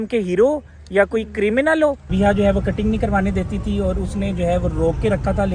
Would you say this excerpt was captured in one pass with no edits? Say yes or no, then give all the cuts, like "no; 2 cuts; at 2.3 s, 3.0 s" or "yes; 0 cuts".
no; 1 cut; at 2.1 s